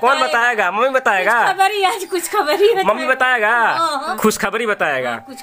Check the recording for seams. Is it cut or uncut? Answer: cut